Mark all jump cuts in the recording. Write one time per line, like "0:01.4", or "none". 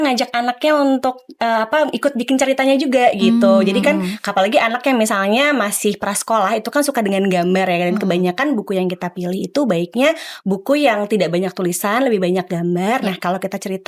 none